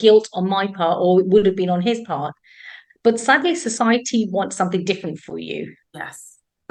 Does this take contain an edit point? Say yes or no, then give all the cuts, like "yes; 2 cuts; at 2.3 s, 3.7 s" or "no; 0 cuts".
no; 0 cuts